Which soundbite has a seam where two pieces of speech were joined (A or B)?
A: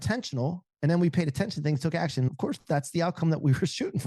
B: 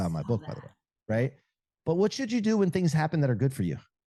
A